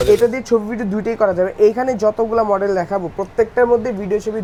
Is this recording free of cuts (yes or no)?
yes